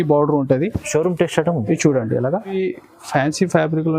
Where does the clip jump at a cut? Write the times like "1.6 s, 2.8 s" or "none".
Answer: 2.5 s